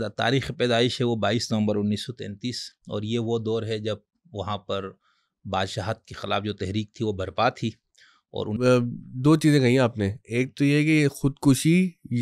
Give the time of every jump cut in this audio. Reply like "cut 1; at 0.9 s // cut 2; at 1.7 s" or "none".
cut 1; at 8.5 s